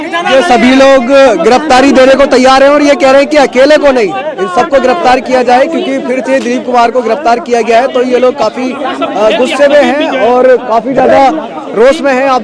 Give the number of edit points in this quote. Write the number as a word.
zero